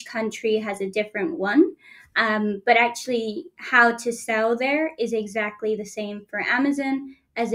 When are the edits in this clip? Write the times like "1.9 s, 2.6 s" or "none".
none